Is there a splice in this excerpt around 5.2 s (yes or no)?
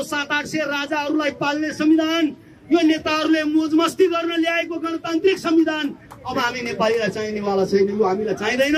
no